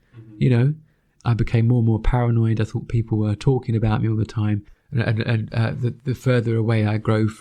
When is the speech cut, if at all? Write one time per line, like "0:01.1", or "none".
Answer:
0:01.2
0:04.7